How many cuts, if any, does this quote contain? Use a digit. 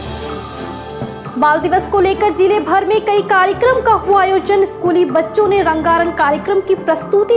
1